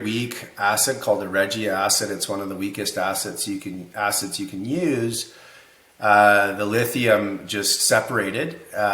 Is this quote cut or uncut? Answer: uncut